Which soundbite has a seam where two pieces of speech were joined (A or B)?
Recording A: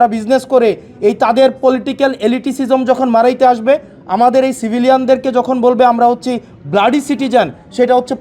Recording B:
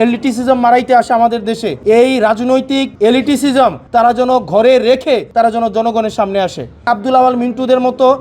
B